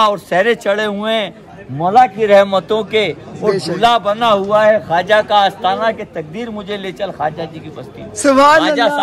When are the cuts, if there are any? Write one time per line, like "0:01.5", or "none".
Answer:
none